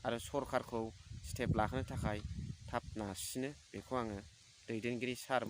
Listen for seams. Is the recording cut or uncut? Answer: cut